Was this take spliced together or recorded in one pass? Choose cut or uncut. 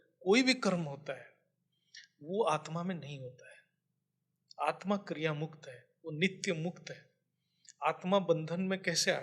uncut